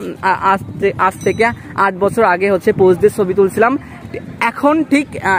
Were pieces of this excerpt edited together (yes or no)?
no